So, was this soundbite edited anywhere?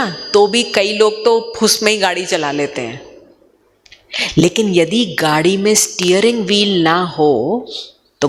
no; 0 cuts

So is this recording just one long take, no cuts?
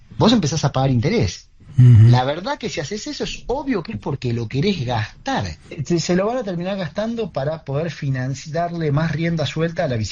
no; 1 cut; at 5.8 s

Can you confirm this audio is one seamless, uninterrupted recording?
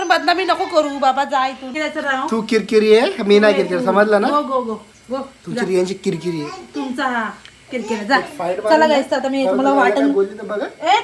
no; 1 cut; at 1.7 s

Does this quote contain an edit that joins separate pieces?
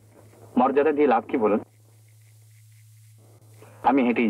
no; 0 cuts

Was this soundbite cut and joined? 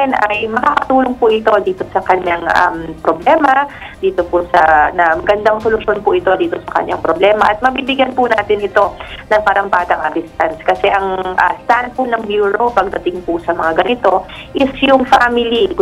no; 0 cuts

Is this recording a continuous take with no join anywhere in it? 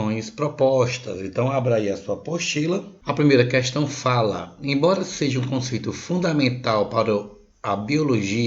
no; 1 cut; at 2.9 s

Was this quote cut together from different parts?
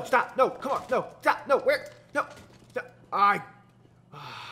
yes; 1 cut; at 2.6 s

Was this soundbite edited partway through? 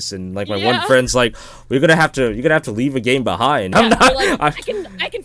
yes; 1 cut; at 3.7 s

